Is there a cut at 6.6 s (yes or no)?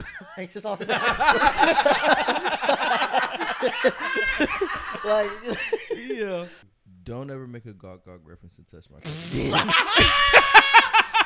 yes